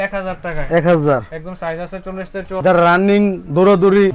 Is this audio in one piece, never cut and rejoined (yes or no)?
no